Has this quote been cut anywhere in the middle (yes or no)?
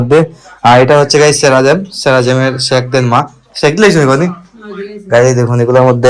no